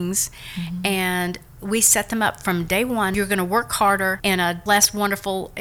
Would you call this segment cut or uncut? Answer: cut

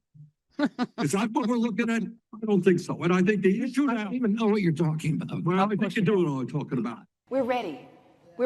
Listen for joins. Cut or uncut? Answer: cut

